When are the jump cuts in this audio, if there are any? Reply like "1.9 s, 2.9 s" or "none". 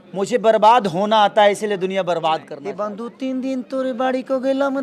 2.6 s